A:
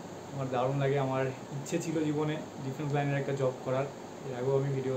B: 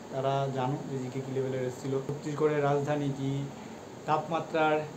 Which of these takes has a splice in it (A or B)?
B